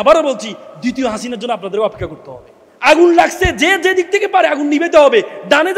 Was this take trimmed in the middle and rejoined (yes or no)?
yes